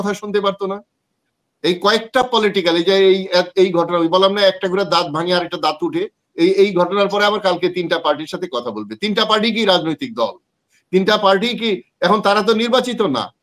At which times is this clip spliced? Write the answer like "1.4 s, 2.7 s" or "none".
none